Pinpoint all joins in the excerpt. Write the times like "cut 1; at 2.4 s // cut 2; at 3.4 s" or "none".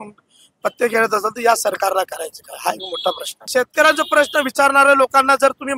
cut 1; at 3.4 s